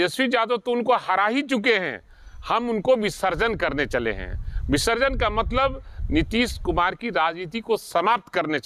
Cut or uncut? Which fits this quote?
uncut